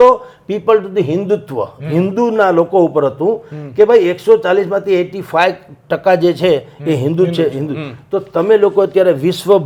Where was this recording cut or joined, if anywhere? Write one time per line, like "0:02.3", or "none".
none